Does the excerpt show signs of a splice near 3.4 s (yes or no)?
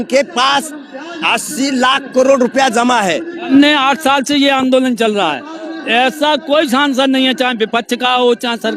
yes